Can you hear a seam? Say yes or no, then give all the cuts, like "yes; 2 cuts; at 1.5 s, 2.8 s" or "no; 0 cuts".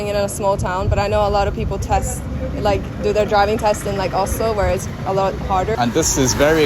yes; 1 cut; at 5.7 s